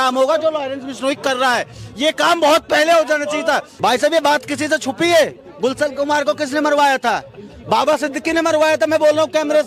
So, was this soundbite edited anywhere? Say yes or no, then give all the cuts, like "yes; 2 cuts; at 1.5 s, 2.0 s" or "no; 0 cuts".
no; 0 cuts